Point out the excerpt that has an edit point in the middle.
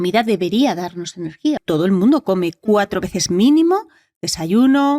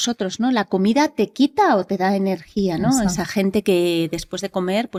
first; 1 cut; at 1.6 s

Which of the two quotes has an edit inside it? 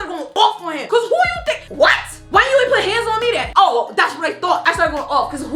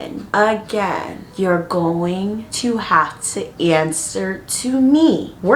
first; 3 cuts; at 2.2 s, 3.5 s, 4.6 s

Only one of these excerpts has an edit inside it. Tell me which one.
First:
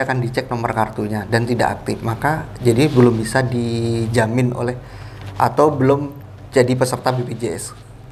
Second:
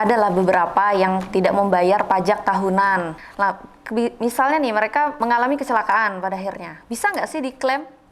second; 2 cuts; at 3.2 s, 5.1 s

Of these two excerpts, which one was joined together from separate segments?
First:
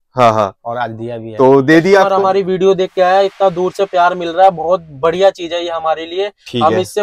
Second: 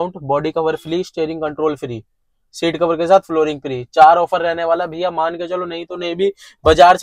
first; 1 cut; at 2.1 s

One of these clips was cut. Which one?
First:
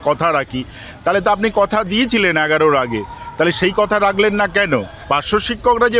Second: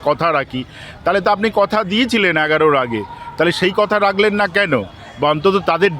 first; 1 cut; at 4.9 s

